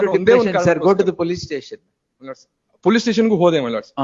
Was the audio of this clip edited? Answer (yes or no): no